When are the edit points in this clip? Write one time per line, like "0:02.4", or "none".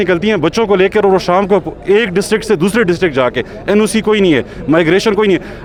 none